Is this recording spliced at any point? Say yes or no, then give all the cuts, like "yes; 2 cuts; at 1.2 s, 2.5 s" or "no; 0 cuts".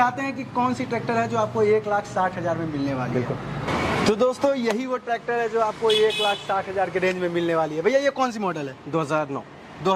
no; 0 cuts